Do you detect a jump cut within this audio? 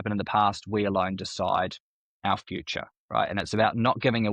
no; 0 cuts

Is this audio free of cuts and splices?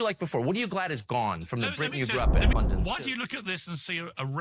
no; 1 cut; at 2.5 s

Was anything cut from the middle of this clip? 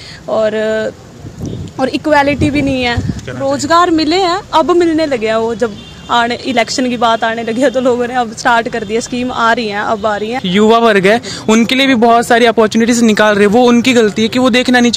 yes; 2 cuts; at 3.2 s, 10.4 s

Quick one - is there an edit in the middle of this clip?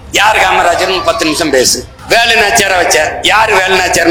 yes; 1 cut; at 1.9 s

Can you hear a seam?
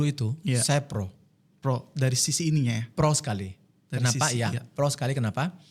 no; 0 cuts

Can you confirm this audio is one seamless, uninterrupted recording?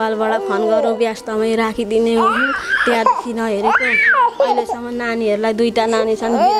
yes; 0 cuts

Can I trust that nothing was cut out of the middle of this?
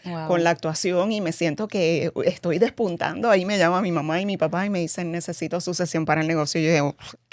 yes; 0 cuts

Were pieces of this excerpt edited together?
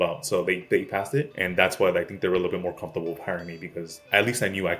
yes; 2 cuts; at 1.4 s, 3.9 s

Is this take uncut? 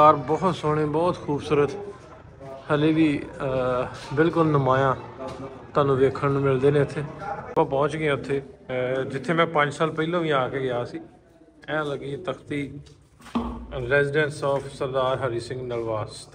no; 1 cut; at 7.4 s

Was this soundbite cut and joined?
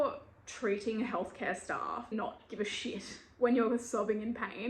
yes; 1 cut; at 2.1 s

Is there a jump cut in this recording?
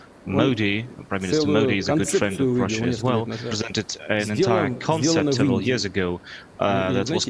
yes; 1 cut; at 3.6 s

